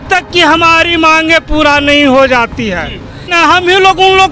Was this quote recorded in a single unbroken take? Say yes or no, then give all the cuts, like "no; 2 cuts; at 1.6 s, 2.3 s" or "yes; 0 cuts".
no; 1 cut; at 3.3 s